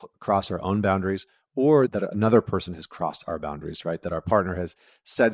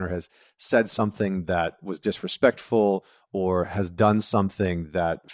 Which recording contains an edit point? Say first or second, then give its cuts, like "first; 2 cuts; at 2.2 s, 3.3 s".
first; 1 cut; at 1.9 s